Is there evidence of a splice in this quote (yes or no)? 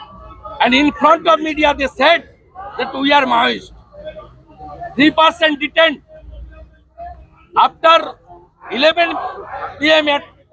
no